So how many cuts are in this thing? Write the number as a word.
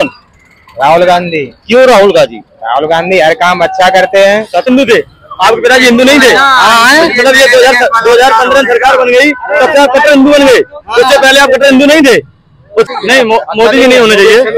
two